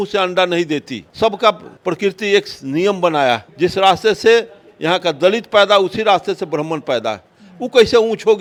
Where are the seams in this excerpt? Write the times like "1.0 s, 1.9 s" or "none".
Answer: none